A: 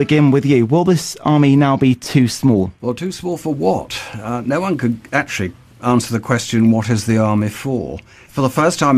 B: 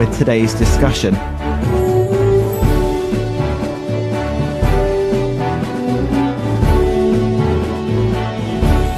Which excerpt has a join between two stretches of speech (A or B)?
A